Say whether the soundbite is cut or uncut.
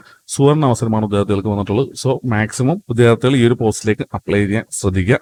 uncut